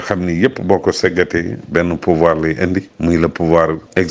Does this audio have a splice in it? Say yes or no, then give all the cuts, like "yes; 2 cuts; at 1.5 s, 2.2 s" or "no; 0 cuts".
no; 0 cuts